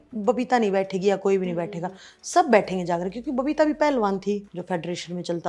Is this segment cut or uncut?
cut